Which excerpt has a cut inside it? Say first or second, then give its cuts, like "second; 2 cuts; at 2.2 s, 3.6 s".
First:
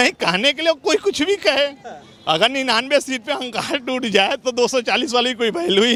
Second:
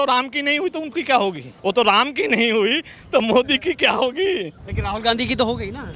second; 2 cuts; at 1.5 s, 4.6 s